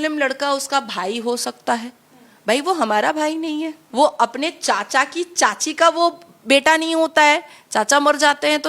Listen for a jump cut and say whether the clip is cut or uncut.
cut